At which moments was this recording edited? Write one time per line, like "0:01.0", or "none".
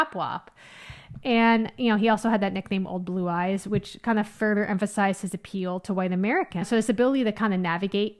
none